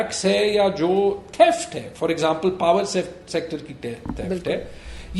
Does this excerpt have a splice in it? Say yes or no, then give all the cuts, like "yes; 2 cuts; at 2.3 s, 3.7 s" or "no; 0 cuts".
no; 0 cuts